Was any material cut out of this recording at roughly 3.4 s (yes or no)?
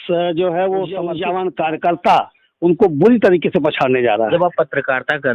no